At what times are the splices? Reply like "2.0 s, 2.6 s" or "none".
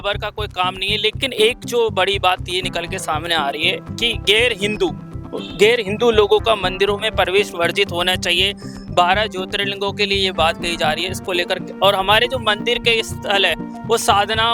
1.2 s